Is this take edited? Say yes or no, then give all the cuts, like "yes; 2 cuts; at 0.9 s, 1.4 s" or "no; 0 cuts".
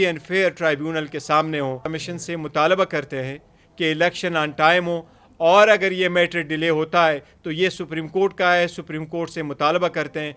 yes; 1 cut; at 1.8 s